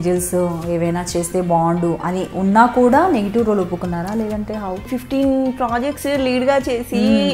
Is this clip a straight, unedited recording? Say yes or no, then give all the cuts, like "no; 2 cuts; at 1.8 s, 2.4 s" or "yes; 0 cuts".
no; 1 cut; at 4.8 s